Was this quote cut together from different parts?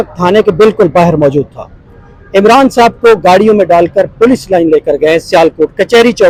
no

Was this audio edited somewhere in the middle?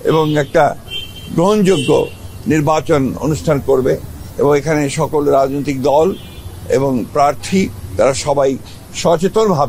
no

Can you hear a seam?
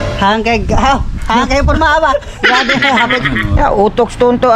yes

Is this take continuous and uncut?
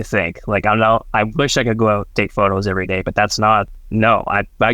no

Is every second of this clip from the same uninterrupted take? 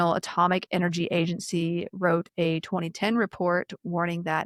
yes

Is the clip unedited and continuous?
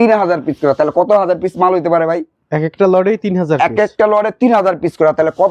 yes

